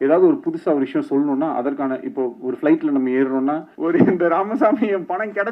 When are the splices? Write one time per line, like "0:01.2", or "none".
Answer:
0:03.7

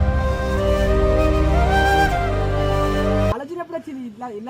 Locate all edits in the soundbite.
0:03.3

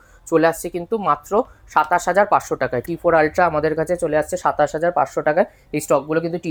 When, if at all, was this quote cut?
none

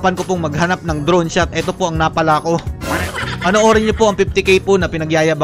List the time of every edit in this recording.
none

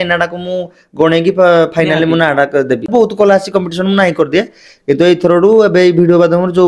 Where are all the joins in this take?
0:02.9

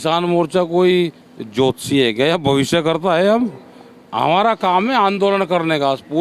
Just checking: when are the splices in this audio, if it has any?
none

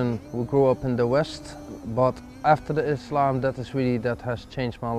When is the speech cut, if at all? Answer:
0:01.7

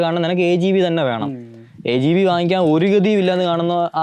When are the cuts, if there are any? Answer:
none

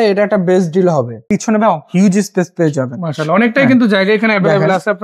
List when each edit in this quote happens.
0:01.2

